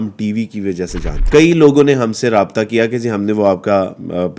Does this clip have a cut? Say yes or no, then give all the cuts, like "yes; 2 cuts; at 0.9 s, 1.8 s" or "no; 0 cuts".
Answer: yes; 1 cut; at 1.1 s